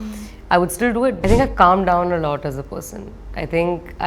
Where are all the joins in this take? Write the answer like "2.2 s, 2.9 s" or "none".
1.2 s